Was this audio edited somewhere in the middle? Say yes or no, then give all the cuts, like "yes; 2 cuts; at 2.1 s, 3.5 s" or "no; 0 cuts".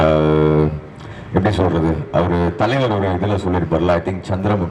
no; 0 cuts